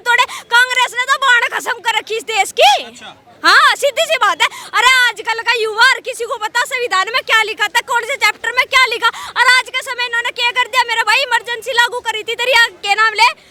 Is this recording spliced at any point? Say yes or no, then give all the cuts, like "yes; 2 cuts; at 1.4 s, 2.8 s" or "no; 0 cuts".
no; 0 cuts